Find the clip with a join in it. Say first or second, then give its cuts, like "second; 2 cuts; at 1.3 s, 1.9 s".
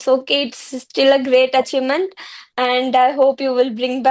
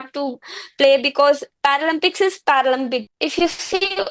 second; 2 cuts; at 1.5 s, 3.1 s